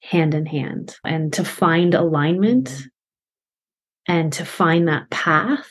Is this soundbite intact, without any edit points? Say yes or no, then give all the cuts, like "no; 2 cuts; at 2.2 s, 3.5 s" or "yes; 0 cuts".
no; 1 cut; at 1.1 s